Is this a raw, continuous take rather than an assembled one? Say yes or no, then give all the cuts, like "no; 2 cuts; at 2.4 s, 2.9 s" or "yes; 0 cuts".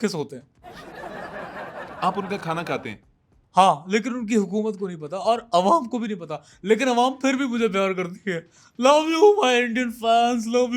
yes; 0 cuts